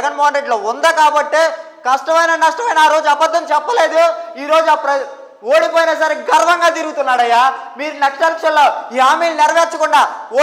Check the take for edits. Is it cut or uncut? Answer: uncut